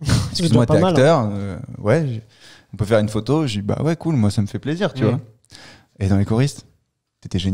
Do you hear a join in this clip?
no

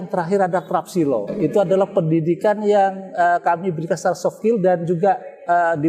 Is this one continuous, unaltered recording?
no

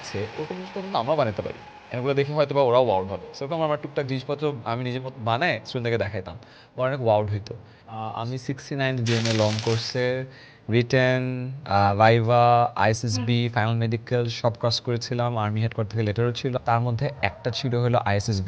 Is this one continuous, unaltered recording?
no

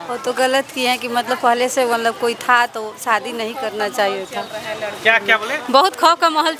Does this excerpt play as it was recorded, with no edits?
yes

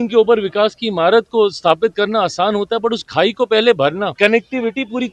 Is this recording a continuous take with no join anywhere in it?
no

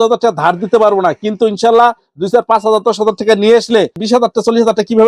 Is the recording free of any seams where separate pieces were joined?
yes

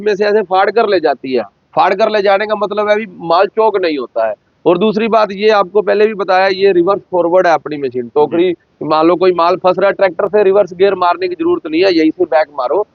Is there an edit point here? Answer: no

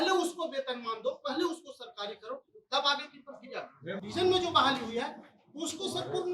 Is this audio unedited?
no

